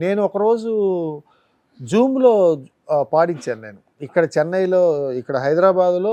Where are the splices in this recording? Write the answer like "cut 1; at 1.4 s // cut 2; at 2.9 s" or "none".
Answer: none